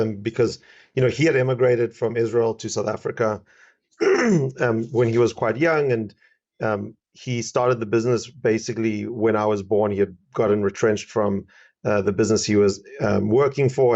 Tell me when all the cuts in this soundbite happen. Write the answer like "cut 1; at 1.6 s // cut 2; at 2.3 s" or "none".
none